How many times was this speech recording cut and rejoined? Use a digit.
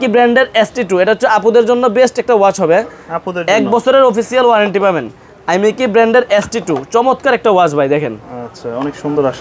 0